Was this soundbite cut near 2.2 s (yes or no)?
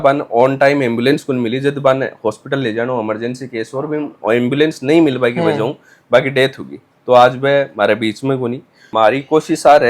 no